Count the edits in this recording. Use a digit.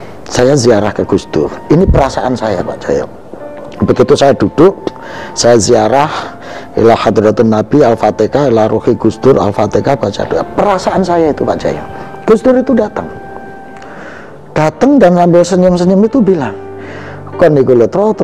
0